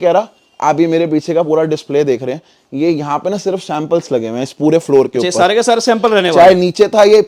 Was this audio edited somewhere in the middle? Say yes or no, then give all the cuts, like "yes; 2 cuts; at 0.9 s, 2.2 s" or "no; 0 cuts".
no; 0 cuts